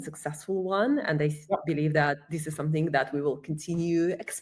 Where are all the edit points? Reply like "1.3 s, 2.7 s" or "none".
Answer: none